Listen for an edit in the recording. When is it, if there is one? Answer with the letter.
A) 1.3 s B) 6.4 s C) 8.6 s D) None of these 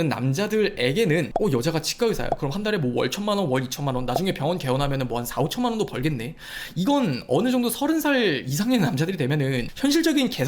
A